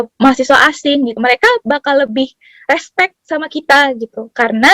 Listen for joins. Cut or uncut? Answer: cut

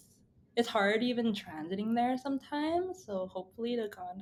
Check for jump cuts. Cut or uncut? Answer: uncut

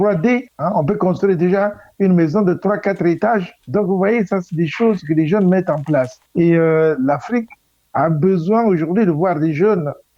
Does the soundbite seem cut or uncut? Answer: uncut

